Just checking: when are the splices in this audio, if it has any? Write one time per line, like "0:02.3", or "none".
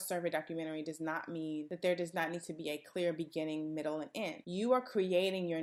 none